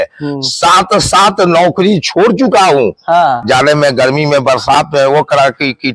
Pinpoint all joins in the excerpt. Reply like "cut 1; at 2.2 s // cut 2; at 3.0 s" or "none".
cut 1; at 3.4 s

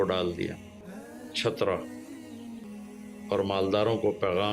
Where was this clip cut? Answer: cut 1; at 2.6 s

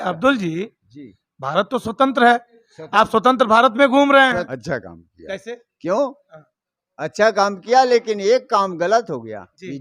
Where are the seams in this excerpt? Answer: cut 1; at 4.4 s

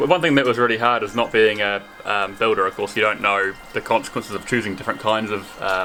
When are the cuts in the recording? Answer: none

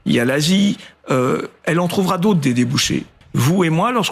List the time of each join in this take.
cut 1; at 3.2 s

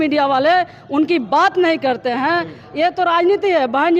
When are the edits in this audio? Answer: none

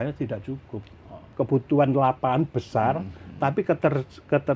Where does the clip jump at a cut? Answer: cut 1; at 1.3 s

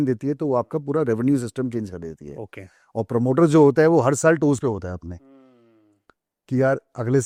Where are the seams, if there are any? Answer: none

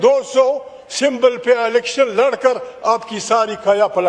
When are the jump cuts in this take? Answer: none

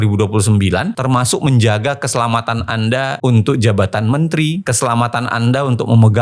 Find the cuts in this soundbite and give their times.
none

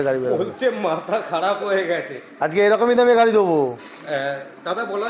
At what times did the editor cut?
none

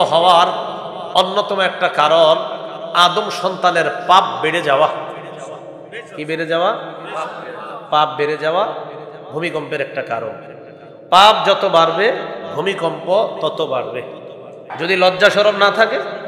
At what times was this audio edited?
cut 1; at 14.8 s

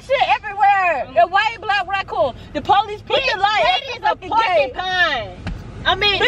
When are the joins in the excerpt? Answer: none

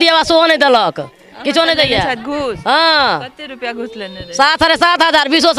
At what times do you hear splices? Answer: none

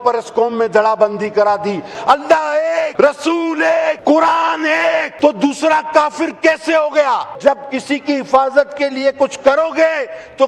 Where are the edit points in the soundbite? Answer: cut 1; at 2.0 s // cut 2; at 2.9 s // cut 3; at 4.0 s // cut 4; at 5.1 s // cut 5; at 7.3 s

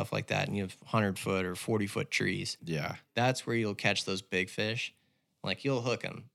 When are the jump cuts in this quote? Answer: cut 1; at 2.6 s

